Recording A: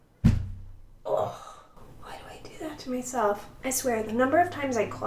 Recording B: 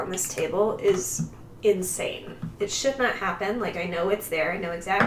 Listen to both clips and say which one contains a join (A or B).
A